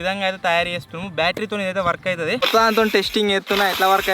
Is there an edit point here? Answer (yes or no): yes